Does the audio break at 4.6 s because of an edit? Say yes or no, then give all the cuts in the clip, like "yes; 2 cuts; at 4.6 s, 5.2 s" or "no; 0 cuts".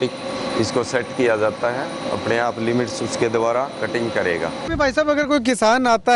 yes; 1 cut; at 4.6 s